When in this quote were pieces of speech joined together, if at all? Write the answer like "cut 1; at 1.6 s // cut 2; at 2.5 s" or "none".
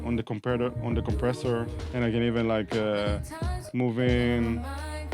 cut 1; at 1.8 s